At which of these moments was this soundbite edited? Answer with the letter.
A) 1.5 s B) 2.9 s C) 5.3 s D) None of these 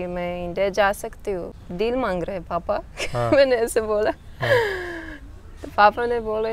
A